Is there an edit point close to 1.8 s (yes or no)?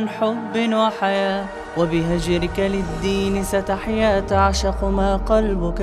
no